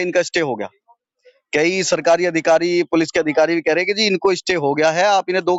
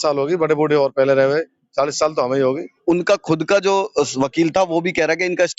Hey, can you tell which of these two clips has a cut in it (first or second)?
second